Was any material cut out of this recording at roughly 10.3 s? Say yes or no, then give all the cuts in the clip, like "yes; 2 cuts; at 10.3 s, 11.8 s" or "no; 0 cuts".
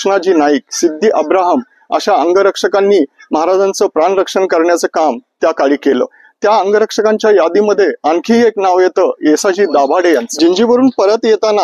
yes; 1 cut; at 10.3 s